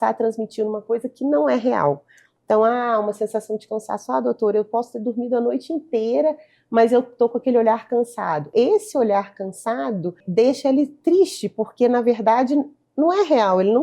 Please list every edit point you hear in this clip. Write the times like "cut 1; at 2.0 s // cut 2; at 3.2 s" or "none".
cut 1; at 8.5 s // cut 2; at 10.2 s